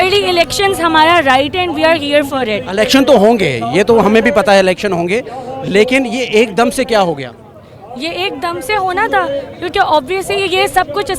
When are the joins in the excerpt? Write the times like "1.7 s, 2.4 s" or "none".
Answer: none